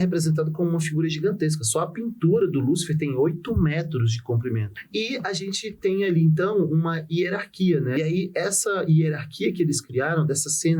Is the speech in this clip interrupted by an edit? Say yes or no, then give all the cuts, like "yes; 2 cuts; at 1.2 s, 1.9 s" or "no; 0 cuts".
yes; 2 cuts; at 4.7 s, 7.9 s